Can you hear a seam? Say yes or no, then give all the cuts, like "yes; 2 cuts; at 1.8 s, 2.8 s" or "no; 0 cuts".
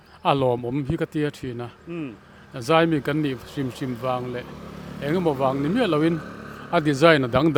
no; 0 cuts